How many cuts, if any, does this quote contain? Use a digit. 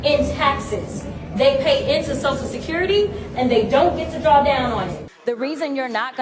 1